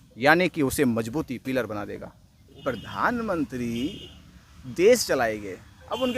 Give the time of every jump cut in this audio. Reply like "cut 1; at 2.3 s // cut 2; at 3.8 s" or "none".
cut 1; at 2.6 s